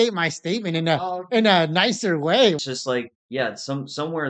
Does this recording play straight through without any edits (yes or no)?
no